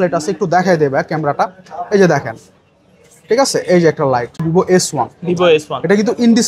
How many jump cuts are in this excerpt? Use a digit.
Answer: 1